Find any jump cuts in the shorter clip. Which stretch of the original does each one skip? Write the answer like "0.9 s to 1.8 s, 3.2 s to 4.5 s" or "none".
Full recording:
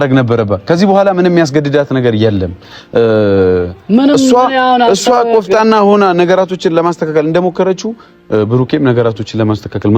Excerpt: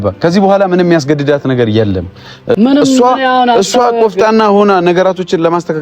3.0 s to 3.9 s